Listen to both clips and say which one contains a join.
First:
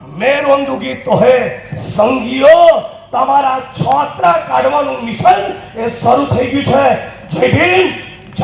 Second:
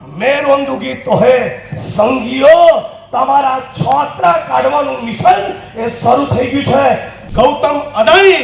second; 1 cut; at 7.2 s

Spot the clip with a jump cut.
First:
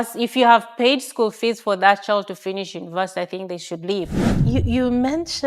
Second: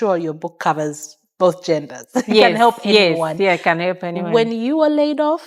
first; 1 cut; at 4.3 s

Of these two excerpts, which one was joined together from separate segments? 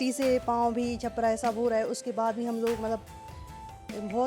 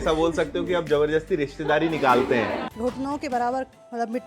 second; 1 cut; at 2.6 s

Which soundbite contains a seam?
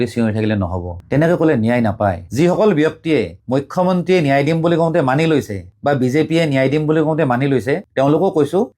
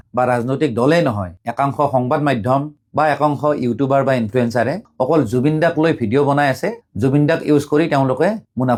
first; 2 cuts; at 1.0 s, 2.2 s

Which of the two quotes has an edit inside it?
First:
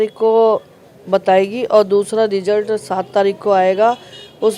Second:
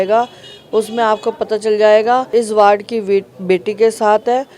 second; 1 cut; at 2.3 s

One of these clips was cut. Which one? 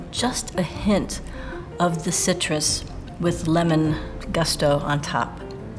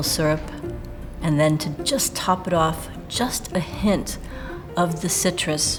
first; 1 cut; at 4.1 s

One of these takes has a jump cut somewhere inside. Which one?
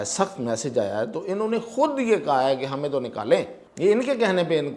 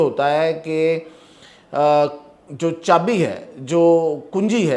first; 1 cut; at 3.6 s

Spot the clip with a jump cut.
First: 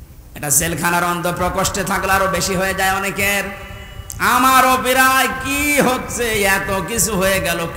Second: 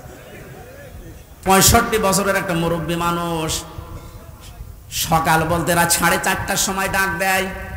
second; 1 cut; at 1.4 s

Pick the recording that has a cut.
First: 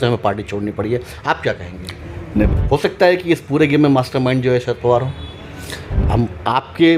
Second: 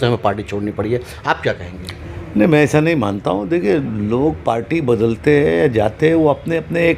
first; 2 cuts; at 2.5 s, 5.9 s

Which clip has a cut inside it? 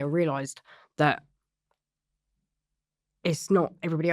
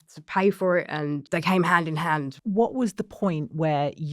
second; 2 cuts; at 1.3 s, 2.3 s

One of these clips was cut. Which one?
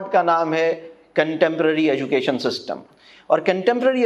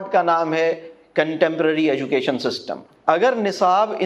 second; 1 cut; at 2.9 s

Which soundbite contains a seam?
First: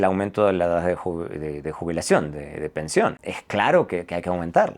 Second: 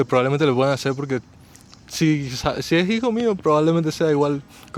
first; 1 cut; at 3.3 s

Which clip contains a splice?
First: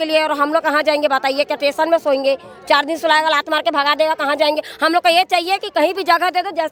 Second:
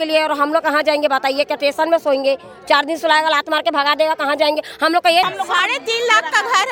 second; 1 cut; at 5.3 s

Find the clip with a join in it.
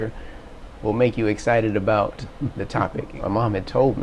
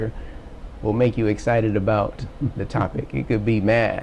first; 1 cut; at 3.1 s

